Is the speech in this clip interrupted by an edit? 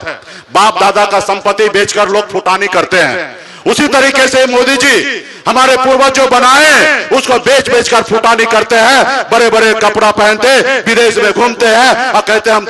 no; 0 cuts

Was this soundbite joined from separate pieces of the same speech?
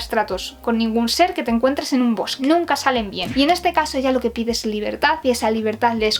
no; 0 cuts

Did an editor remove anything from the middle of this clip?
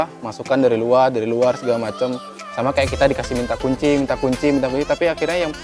no; 0 cuts

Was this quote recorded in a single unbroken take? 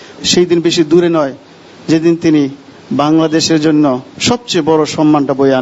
yes; 0 cuts

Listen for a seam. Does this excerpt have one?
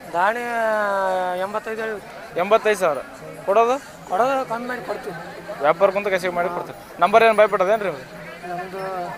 no; 0 cuts

